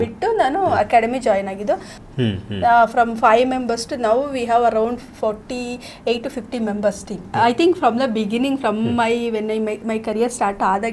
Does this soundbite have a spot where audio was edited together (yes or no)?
yes